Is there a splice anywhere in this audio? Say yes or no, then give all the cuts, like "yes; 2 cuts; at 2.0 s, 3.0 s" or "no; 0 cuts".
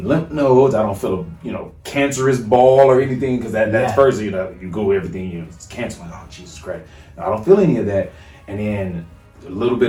no; 0 cuts